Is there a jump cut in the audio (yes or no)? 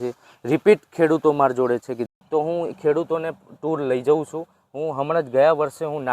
yes